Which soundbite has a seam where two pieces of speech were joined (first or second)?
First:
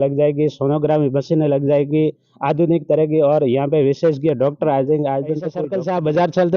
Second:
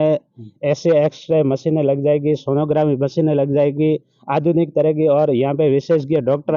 first